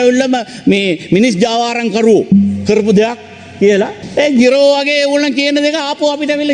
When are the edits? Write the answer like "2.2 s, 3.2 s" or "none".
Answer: 4.0 s